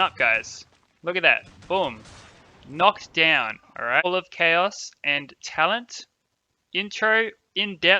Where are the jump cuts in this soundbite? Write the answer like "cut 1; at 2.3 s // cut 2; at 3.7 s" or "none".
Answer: cut 1; at 4.0 s